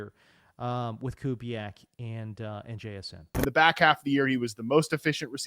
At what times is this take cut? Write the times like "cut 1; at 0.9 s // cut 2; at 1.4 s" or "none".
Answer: cut 1; at 3.3 s

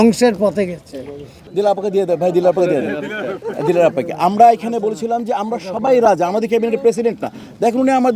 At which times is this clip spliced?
cut 1; at 1.4 s

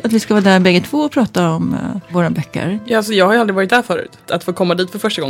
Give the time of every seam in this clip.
cut 1; at 2.6 s // cut 2; at 4.2 s

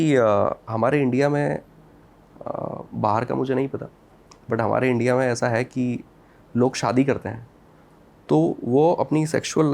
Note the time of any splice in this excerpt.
none

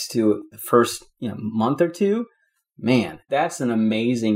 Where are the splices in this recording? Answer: cut 1; at 3.0 s

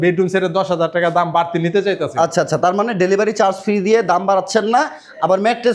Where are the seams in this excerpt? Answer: none

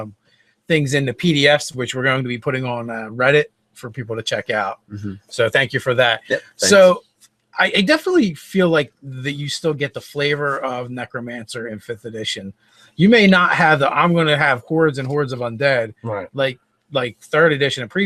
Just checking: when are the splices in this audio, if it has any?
none

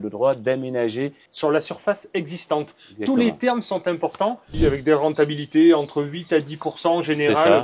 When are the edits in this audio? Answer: cut 1; at 1.2 s // cut 2; at 4.5 s

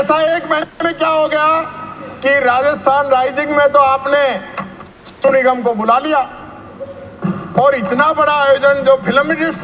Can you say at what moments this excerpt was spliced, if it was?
none

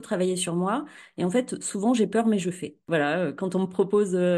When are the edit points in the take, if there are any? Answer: cut 1; at 2.8 s

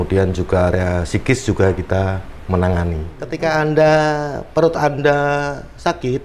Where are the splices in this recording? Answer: cut 1; at 3.3 s

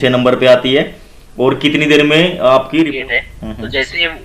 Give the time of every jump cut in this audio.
cut 1; at 2.9 s

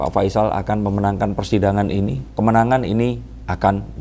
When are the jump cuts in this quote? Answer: cut 1; at 2.2 s

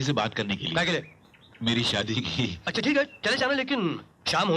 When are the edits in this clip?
cut 1; at 2.6 s

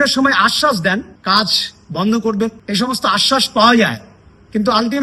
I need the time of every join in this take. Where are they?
cut 1; at 1.1 s // cut 2; at 2.6 s

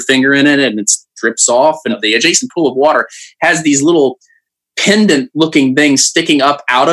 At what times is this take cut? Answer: cut 1; at 2.0 s

